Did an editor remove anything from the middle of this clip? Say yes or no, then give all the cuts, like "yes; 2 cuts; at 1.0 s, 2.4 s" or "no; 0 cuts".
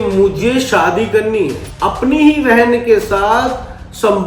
yes; 1 cut; at 1.6 s